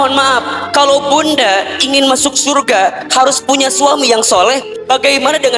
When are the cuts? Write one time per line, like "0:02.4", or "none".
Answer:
0:04.7

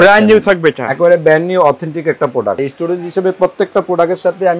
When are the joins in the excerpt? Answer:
0:02.6

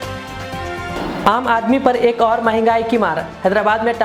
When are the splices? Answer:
none

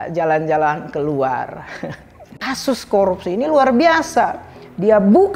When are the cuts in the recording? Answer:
0:02.5

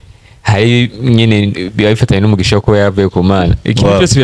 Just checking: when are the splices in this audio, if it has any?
none

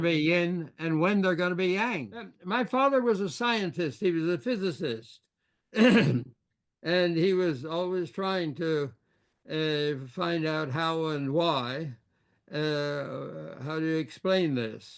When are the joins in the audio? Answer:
0:02.4

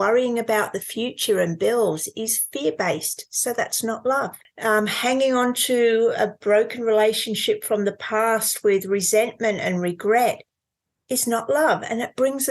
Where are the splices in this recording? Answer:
0:04.4

